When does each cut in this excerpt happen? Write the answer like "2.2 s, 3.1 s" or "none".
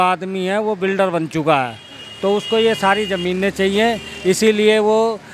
none